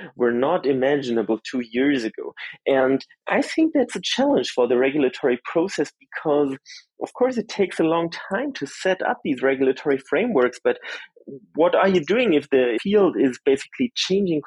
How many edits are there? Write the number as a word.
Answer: one